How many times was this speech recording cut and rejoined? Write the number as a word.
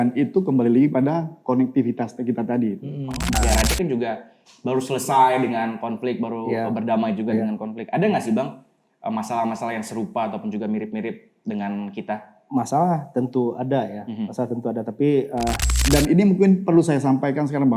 two